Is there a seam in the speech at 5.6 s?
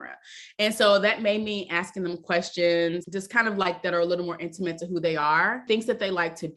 yes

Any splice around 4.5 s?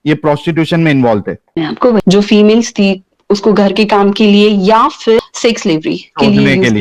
no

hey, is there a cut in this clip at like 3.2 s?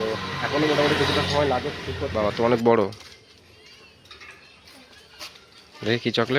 no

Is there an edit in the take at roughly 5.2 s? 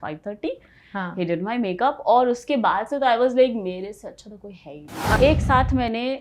yes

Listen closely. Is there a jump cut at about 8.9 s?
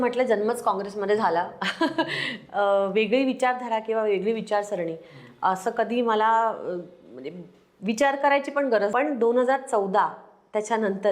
yes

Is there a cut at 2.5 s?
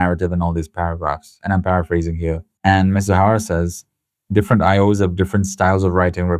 yes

